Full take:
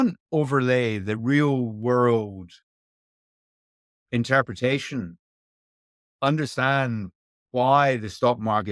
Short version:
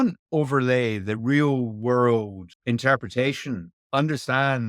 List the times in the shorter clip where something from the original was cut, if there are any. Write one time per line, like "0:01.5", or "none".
0:02.4
0:03.7